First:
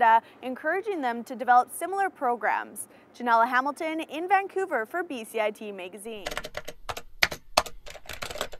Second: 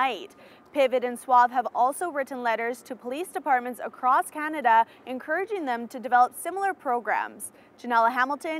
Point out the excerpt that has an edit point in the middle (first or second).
first